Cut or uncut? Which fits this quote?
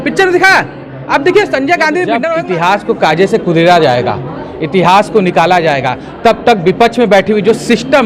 cut